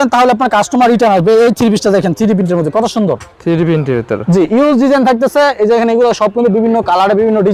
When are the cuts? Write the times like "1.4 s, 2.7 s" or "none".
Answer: none